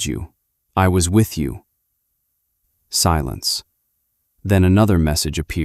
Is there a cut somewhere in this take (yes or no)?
yes